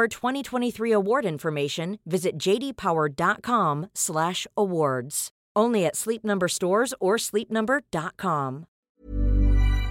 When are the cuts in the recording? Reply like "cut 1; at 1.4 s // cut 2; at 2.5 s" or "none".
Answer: cut 1; at 8.8 s